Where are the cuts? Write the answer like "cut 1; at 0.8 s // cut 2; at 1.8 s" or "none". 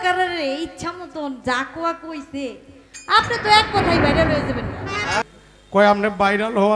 cut 1; at 5.2 s